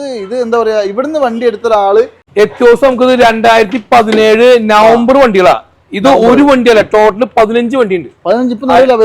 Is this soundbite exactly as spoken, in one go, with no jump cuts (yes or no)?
no